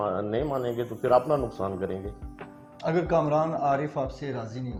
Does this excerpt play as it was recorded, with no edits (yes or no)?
yes